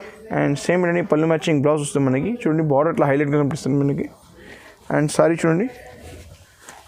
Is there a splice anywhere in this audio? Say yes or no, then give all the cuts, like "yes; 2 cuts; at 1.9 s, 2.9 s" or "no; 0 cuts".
no; 0 cuts